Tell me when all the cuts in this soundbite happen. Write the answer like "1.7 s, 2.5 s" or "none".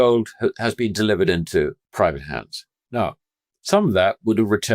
1.8 s

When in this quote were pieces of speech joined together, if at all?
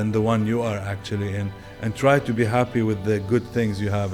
none

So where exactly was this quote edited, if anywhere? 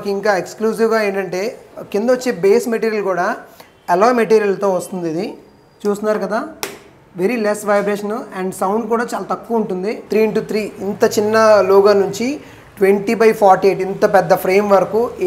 10.0 s

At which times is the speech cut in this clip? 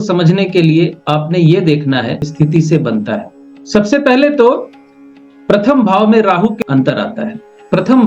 2.2 s, 6.5 s

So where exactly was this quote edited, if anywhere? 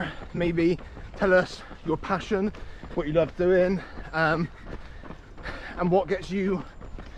none

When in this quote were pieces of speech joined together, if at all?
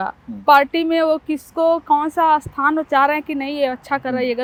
none

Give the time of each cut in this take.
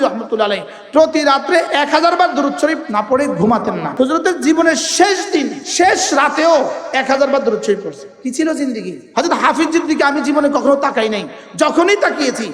1.7 s, 3.8 s, 5.6 s, 8.0 s, 8.9 s

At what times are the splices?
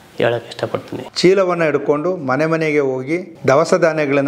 1.0 s

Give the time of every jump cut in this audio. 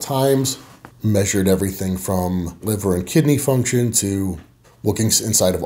2.6 s

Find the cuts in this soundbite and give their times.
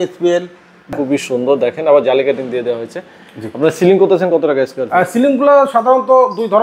0.9 s

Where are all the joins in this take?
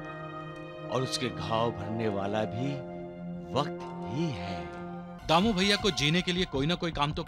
5.1 s

